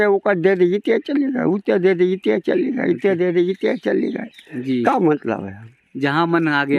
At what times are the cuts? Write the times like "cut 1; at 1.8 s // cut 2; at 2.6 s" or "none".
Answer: none

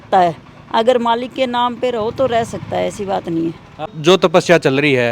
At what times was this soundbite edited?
cut 1; at 4.0 s

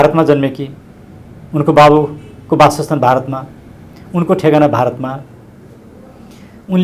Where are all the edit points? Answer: none

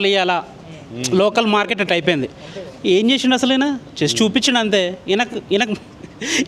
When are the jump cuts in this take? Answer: none

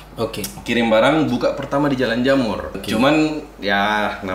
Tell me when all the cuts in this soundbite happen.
cut 1; at 2.8 s

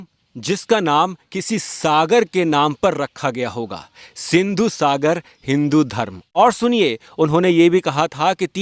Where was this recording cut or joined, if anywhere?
none

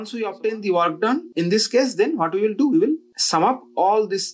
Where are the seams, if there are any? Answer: cut 1; at 1.3 s // cut 2; at 3.1 s

